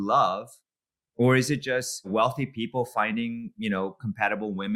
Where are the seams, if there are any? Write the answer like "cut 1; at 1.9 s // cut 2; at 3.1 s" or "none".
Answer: cut 1; at 2.1 s